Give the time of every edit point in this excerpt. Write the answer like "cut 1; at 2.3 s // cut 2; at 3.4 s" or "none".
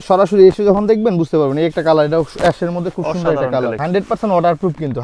cut 1; at 3.8 s